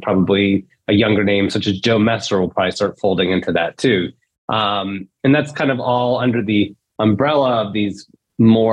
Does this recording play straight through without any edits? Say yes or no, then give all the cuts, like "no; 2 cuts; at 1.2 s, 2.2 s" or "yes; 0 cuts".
yes; 0 cuts